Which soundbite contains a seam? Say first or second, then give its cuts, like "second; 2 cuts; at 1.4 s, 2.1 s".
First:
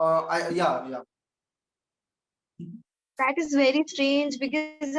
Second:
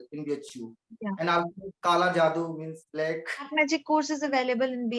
second; 1 cut; at 3.5 s